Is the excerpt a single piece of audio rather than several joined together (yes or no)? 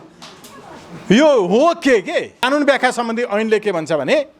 no